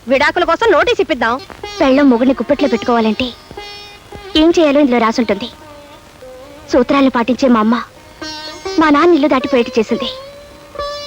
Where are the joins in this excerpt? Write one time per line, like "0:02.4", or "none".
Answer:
0:01.5